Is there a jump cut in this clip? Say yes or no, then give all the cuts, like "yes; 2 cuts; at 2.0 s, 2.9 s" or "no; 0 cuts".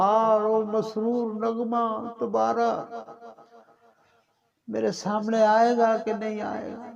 no; 0 cuts